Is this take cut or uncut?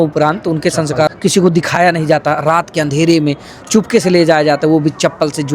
cut